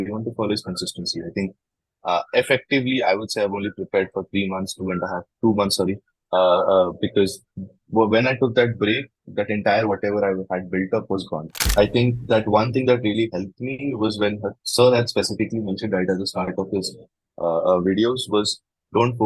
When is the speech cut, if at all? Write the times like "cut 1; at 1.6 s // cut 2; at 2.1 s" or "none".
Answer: cut 1; at 11.7 s